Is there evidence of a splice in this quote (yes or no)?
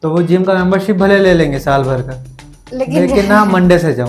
no